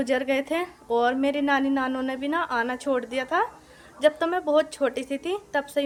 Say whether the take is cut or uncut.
uncut